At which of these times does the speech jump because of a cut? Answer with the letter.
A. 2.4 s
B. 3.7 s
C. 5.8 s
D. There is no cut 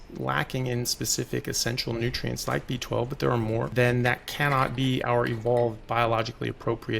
B